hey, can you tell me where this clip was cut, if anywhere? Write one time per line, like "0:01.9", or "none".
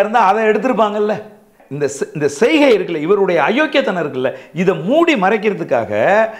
0:01.5